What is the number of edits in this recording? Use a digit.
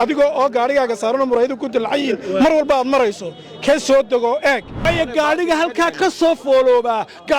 1